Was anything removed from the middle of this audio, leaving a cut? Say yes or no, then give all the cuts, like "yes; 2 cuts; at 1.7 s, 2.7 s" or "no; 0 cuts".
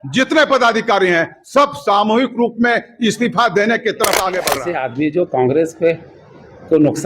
yes; 1 cut; at 4.7 s